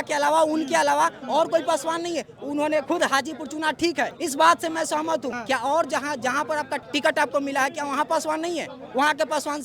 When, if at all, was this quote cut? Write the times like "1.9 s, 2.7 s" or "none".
4.1 s, 5.3 s, 6.8 s